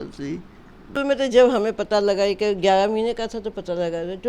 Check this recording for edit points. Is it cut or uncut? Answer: cut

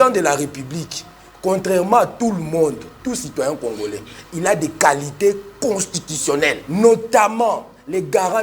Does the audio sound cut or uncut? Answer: cut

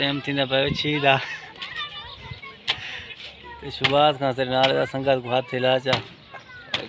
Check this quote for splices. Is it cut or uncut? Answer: uncut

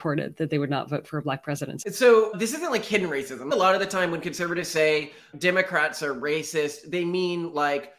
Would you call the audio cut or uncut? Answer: cut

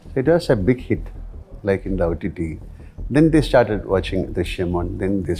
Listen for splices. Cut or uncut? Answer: uncut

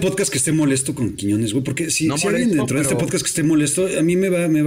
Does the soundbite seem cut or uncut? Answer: uncut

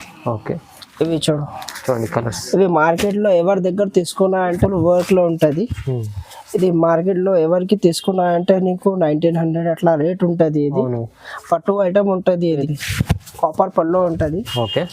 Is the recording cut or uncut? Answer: cut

